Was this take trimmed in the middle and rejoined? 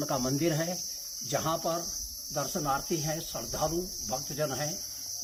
no; 0 cuts

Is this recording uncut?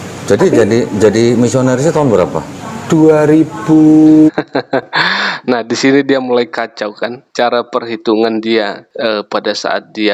yes; 0 cuts

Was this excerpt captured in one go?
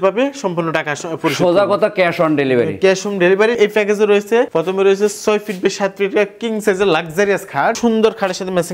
no; 3 cuts; at 3.6 s, 4.5 s, 7.8 s

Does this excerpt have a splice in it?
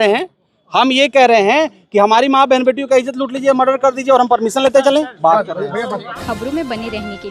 no; 0 cuts

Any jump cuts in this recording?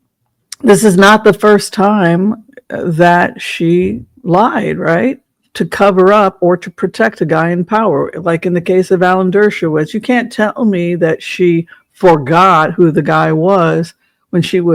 no; 0 cuts

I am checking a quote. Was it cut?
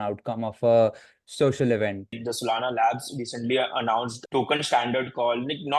yes; 2 cuts; at 2.2 s, 4.2 s

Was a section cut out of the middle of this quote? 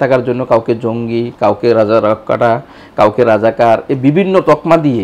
no; 0 cuts

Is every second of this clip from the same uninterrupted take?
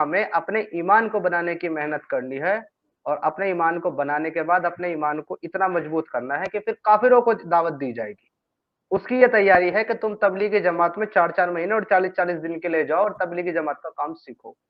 yes; 0 cuts

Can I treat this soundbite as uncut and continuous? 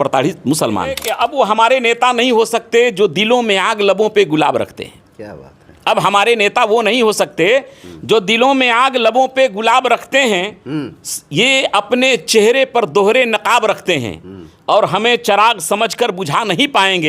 no; 1 cut; at 1.1 s

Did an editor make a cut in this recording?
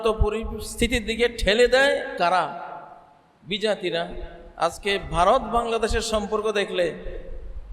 no; 0 cuts

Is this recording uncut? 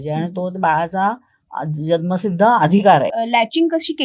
no; 1 cut; at 3.1 s

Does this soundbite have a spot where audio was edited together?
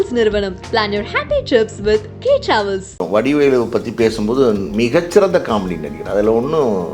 yes; 1 cut; at 3.0 s

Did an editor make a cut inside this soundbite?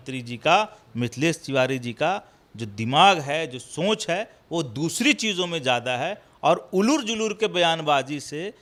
no; 0 cuts

